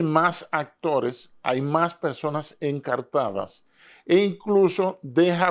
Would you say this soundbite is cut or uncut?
uncut